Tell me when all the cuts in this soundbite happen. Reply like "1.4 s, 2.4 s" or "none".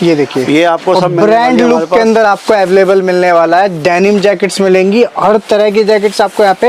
none